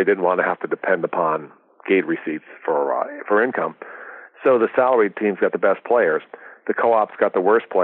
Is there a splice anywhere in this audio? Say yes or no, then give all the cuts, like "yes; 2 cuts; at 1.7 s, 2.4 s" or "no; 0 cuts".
no; 0 cuts